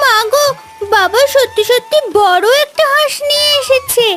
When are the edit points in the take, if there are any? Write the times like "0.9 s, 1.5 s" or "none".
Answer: none